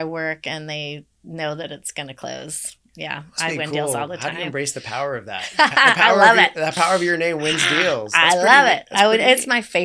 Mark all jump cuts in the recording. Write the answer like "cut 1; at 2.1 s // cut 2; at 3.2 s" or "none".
none

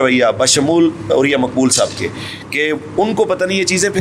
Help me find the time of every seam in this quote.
none

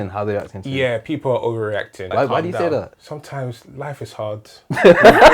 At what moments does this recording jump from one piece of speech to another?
cut 1; at 2.0 s // cut 2; at 3.0 s

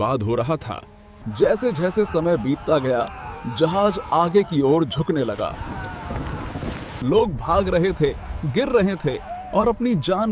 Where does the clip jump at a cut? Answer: cut 1; at 7.0 s

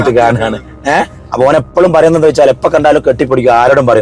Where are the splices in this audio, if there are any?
cut 1; at 1.2 s

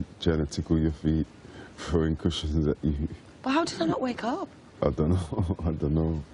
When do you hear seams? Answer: cut 1; at 1.0 s

